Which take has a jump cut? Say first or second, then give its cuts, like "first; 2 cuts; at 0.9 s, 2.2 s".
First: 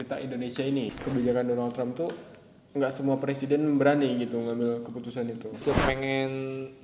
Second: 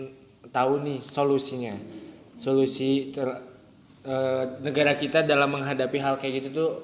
first; 2 cuts; at 1.0 s, 5.6 s